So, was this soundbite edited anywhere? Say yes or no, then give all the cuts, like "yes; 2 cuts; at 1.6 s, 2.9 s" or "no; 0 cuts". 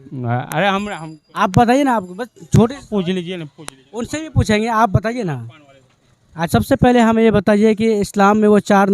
yes; 1 cut; at 6.3 s